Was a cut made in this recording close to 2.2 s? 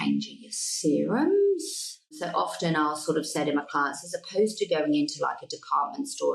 yes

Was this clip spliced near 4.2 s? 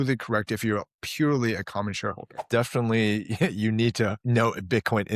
yes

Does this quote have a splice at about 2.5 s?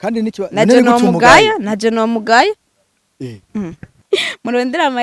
no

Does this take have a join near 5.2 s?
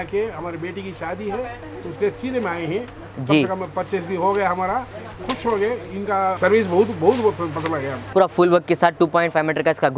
no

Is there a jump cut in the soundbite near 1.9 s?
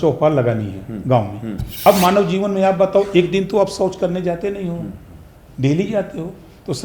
yes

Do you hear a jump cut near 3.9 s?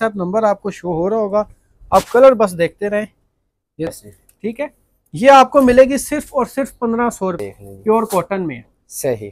yes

